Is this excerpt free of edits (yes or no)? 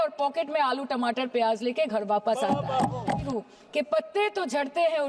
no